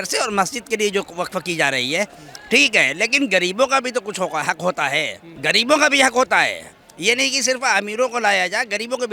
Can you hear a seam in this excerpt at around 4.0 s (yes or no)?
no